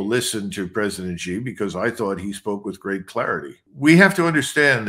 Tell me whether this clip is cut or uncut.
uncut